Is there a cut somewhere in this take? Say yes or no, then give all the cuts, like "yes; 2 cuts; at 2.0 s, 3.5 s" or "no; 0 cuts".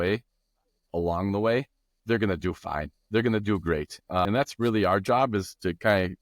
yes; 1 cut; at 4.2 s